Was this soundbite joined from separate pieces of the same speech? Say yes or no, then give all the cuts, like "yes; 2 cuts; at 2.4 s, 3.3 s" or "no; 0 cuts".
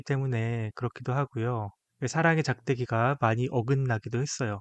yes; 1 cut; at 1.8 s